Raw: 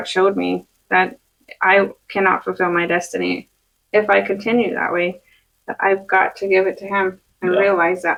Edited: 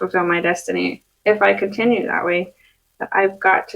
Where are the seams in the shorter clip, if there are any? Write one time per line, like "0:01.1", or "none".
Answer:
0:01.1